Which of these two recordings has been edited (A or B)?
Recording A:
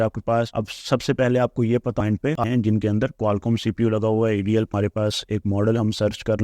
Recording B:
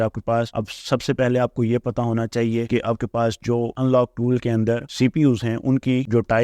A